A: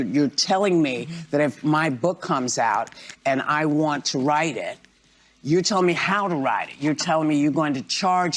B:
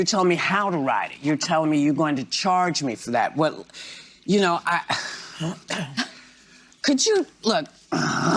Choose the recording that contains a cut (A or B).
B